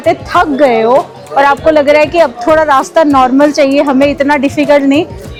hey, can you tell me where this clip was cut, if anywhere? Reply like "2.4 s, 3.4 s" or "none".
none